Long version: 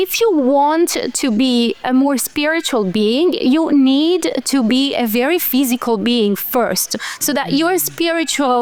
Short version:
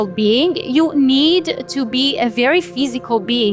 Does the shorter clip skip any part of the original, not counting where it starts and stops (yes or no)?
no